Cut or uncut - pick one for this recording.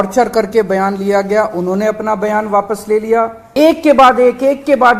cut